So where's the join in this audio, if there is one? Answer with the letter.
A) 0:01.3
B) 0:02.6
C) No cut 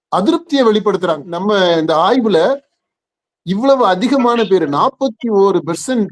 A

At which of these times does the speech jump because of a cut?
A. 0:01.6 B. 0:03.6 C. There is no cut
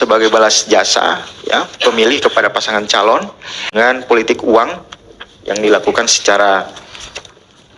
B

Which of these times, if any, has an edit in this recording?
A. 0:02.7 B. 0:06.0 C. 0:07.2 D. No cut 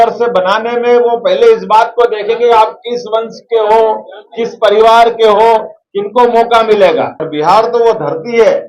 C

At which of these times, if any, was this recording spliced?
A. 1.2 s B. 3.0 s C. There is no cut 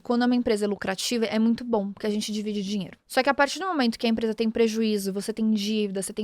B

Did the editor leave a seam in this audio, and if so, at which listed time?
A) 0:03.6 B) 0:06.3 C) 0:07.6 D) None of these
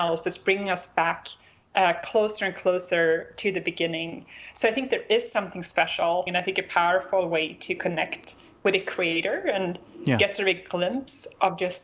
B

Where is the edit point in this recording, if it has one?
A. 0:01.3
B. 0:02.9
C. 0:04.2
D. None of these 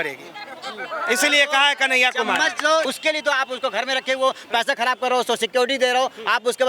B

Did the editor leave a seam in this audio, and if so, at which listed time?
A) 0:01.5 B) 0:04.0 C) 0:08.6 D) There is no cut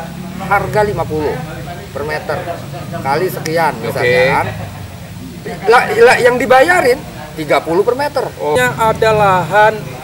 C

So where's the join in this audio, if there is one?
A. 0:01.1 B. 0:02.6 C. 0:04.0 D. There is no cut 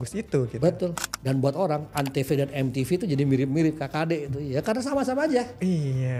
A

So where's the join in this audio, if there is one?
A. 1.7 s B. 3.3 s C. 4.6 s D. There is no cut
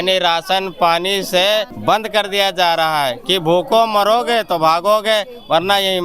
A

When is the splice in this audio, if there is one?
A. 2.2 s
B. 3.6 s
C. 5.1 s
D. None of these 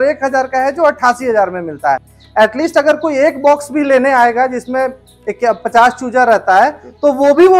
A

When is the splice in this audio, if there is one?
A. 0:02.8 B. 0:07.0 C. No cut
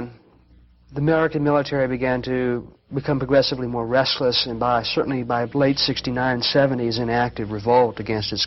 C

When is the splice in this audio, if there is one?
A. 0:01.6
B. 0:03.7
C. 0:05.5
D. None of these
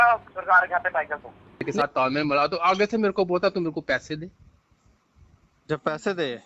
A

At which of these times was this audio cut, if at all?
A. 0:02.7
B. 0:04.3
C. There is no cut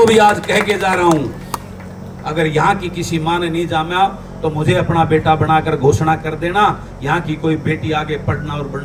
C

